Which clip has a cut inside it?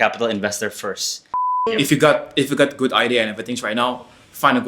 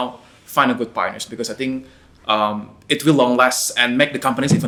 first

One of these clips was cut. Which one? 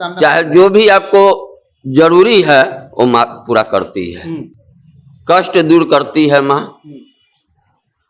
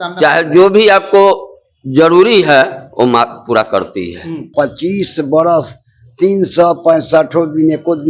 second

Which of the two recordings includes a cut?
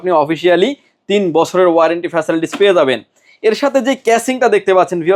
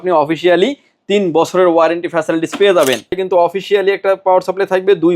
second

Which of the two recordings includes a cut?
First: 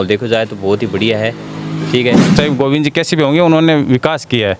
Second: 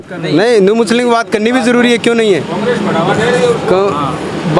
first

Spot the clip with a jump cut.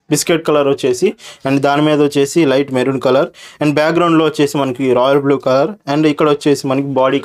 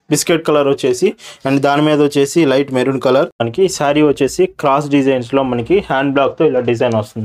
second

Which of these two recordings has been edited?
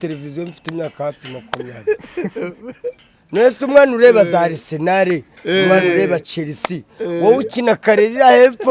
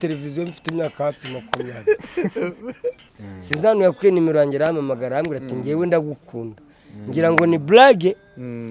second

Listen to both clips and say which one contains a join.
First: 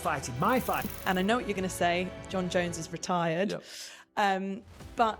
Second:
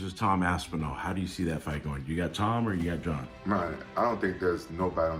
first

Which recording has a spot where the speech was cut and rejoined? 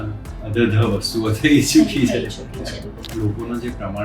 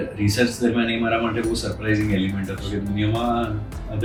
first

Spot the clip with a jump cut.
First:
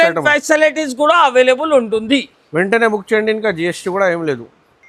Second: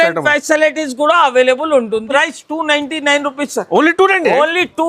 second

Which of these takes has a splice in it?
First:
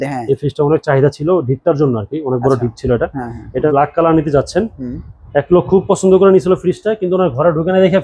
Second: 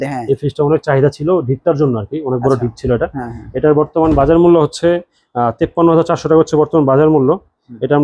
first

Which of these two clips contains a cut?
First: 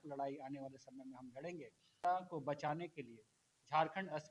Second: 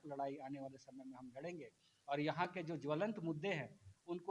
first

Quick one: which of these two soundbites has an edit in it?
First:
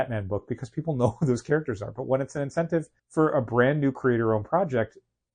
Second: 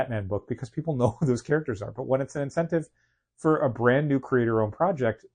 first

